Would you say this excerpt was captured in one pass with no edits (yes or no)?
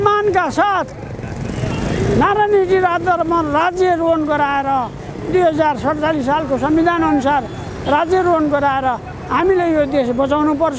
yes